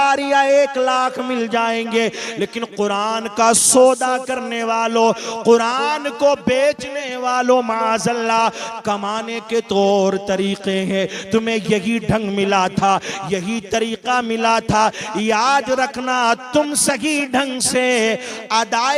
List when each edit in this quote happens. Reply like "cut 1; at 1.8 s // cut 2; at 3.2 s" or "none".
none